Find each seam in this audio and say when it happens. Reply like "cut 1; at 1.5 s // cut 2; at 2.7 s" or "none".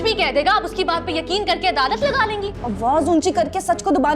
cut 1; at 2.6 s